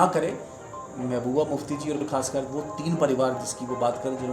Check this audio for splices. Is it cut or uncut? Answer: cut